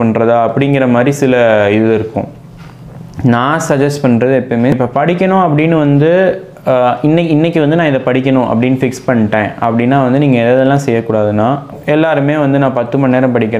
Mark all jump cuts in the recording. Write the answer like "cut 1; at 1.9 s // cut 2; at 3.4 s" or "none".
cut 1; at 4.7 s // cut 2; at 11.7 s